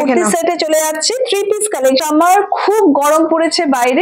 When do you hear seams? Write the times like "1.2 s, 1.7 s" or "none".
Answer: 2.0 s